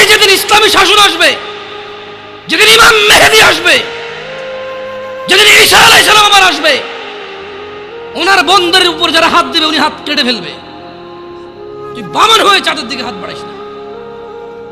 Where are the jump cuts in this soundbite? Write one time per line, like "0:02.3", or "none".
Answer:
0:03.9
0:05.3